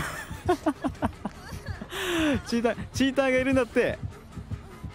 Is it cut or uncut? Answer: uncut